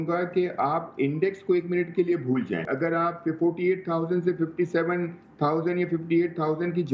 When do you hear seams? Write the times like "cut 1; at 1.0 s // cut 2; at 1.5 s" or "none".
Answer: cut 1; at 2.7 s